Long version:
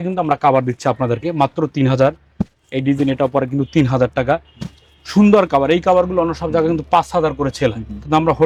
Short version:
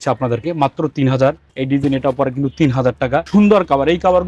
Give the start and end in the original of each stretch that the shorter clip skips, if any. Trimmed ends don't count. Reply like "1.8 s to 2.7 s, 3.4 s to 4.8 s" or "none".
2.2 s to 2.6 s, 4.4 s to 5.1 s